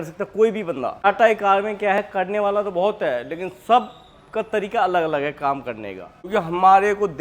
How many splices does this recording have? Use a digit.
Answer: 2